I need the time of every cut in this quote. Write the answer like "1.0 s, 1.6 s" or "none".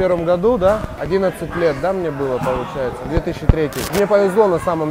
0.9 s, 3.9 s